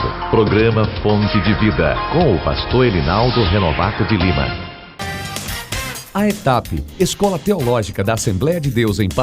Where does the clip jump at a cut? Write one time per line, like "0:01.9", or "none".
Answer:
none

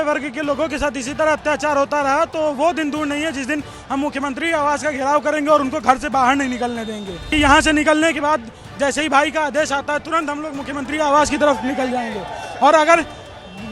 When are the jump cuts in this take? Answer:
0:07.3

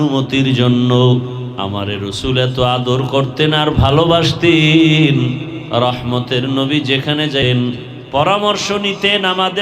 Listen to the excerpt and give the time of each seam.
0:01.4
0:05.5
0:07.5

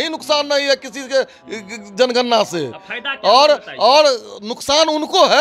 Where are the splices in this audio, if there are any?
none

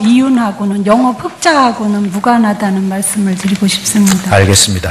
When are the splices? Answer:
0:02.1

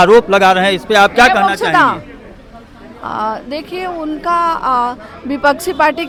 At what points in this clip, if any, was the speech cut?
none

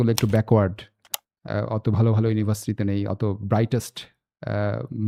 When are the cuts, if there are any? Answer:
none

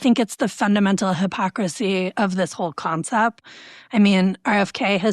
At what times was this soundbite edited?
0:03.5

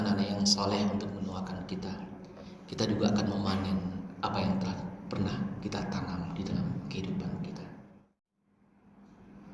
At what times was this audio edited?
0:08.0

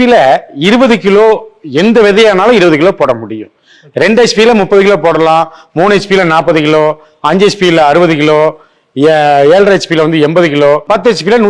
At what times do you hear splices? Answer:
none

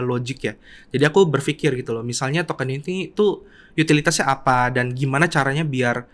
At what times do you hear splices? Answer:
none

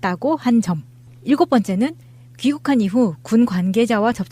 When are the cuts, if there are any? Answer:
0:03.0

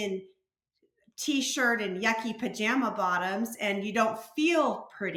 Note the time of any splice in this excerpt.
none

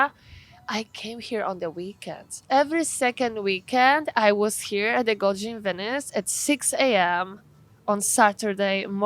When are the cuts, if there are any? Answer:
0:02.3

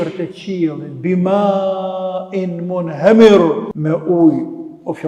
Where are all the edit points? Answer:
0:03.7

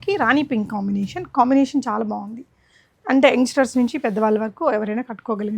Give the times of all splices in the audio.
none

